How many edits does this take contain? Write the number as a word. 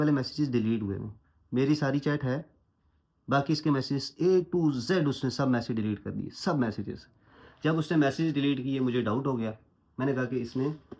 zero